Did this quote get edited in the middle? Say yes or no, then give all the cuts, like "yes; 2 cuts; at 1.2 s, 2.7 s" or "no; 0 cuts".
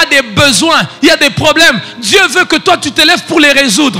no; 0 cuts